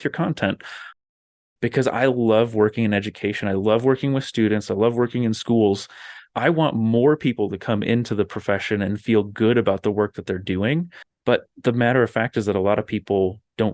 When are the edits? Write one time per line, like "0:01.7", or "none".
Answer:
0:01.5
0:11.0

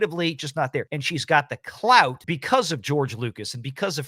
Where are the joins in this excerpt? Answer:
0:01.0
0:02.3

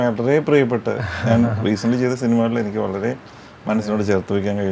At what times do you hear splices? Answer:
none

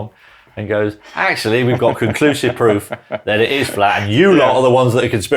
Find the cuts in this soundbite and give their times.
none

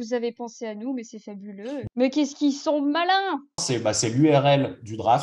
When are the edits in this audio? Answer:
0:01.8
0:03.6

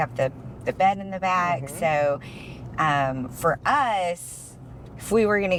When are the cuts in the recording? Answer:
none

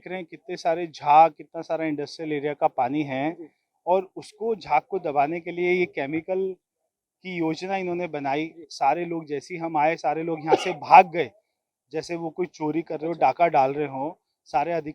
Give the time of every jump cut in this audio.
none

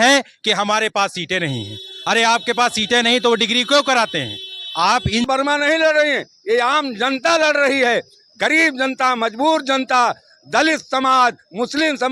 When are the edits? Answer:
0:05.3

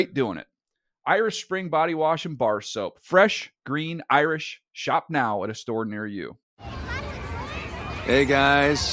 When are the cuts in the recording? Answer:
0:06.4

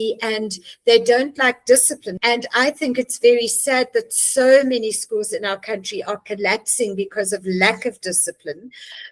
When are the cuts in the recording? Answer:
0:02.1

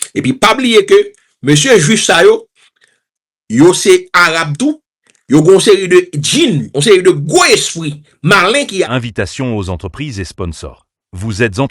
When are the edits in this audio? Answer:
0:08.8

